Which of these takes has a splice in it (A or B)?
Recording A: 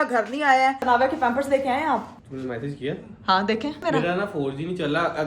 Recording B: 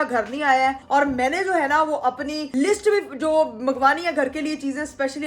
A